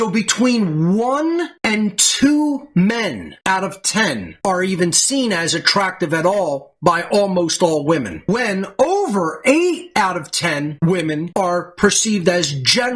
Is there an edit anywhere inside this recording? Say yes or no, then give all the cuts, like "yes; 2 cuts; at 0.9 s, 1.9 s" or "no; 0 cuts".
no; 0 cuts